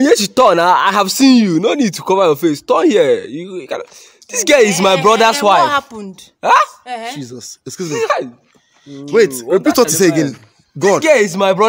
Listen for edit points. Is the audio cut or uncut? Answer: uncut